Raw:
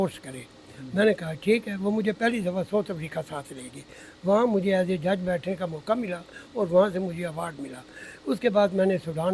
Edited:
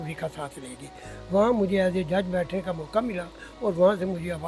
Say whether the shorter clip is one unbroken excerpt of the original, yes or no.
yes